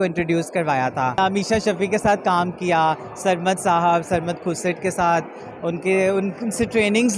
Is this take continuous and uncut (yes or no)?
no